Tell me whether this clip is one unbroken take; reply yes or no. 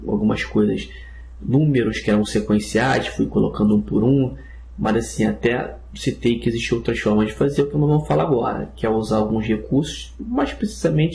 no